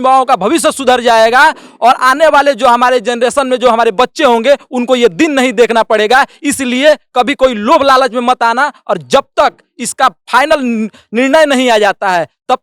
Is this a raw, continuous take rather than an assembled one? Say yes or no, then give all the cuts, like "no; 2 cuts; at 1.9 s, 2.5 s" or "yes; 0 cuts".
yes; 0 cuts